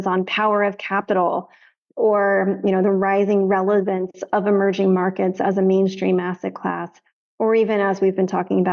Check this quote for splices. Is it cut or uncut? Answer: uncut